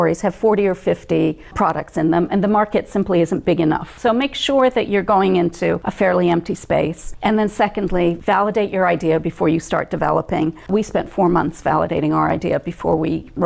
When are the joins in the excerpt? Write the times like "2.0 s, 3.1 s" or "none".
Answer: 1.4 s, 3.9 s, 5.9 s, 7.0 s, 10.6 s